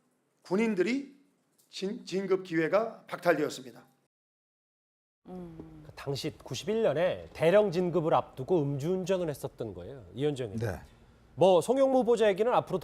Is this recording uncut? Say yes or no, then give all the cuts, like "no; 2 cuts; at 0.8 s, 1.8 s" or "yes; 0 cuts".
no; 1 cut; at 10.8 s